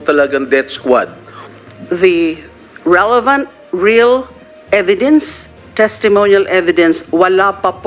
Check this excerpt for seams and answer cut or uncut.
cut